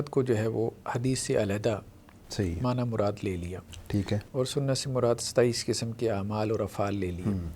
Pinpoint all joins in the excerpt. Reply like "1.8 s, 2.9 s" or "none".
none